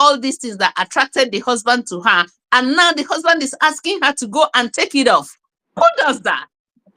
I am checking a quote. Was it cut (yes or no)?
no